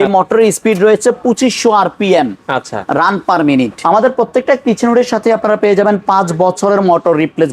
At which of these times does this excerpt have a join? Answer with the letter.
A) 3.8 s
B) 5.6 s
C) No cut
A